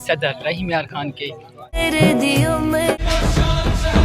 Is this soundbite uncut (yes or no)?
no